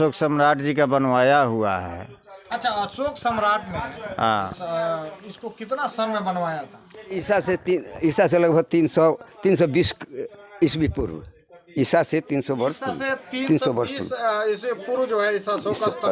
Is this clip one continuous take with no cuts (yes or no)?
yes